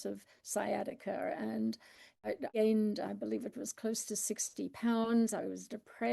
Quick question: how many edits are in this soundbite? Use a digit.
1